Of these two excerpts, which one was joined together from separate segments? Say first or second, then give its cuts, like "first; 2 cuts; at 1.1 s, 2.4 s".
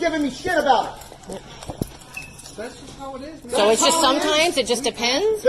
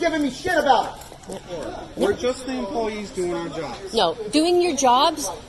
second; 1 cut; at 1.6 s